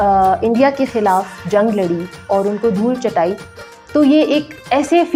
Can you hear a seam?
no; 0 cuts

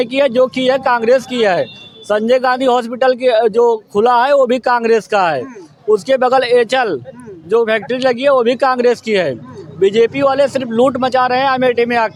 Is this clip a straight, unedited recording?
yes; 0 cuts

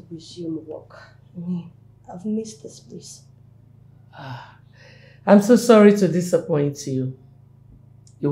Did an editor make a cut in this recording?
no; 0 cuts

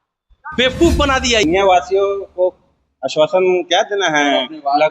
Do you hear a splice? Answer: yes; 1 cut; at 1.4 s

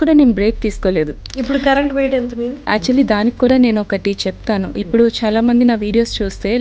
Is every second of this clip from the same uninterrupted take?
no; 2 cuts; at 1.3 s, 2.6 s

